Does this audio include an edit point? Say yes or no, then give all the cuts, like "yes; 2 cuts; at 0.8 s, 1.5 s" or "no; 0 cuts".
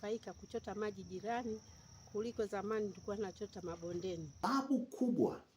yes; 1 cut; at 4.4 s